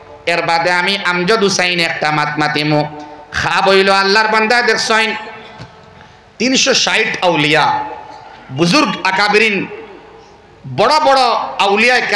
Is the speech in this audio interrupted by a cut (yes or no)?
no